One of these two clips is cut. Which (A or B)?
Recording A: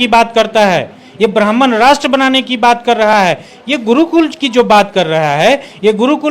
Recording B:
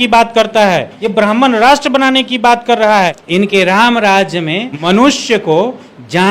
B